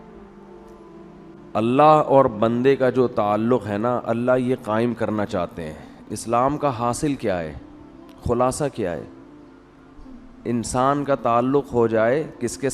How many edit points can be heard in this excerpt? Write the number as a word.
one